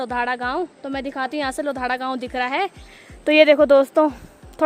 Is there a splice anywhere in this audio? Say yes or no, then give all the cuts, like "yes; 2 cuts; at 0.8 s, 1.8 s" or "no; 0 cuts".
no; 0 cuts